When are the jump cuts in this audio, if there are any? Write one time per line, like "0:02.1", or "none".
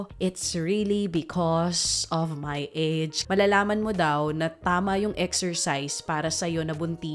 0:03.2